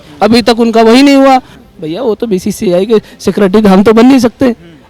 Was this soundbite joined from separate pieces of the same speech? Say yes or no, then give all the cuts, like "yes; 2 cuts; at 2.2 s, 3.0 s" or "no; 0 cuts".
yes; 1 cut; at 1.6 s